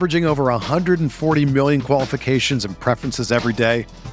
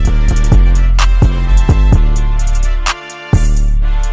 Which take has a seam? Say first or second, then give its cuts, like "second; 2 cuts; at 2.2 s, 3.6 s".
second; 1 cut; at 0.9 s